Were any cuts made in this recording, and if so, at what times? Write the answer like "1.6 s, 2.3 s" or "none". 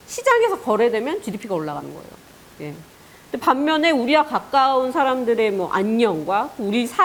none